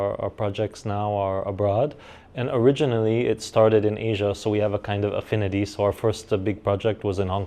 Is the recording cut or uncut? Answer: uncut